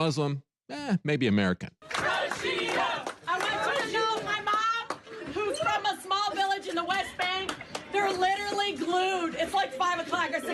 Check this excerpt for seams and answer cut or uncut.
cut